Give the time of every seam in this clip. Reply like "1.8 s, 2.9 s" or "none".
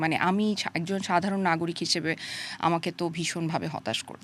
none